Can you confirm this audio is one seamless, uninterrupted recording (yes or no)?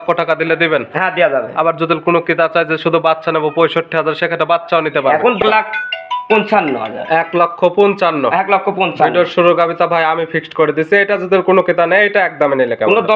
no